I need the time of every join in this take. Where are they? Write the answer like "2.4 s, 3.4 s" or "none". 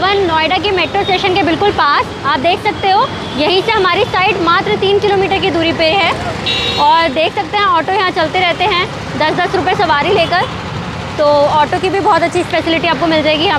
none